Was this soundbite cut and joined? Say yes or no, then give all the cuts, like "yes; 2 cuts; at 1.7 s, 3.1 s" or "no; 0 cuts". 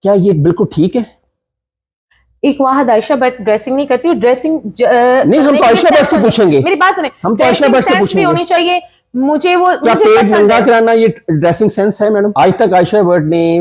yes; 1 cut; at 12.3 s